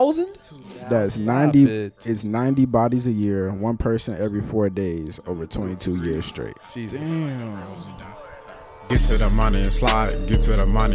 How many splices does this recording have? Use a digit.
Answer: 1